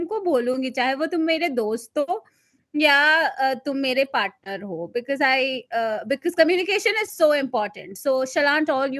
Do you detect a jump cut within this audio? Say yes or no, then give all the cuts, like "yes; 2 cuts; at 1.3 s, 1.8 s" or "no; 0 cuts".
no; 0 cuts